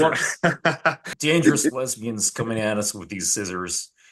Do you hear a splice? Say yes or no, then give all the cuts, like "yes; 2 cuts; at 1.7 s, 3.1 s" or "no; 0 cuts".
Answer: yes; 1 cut; at 1.1 s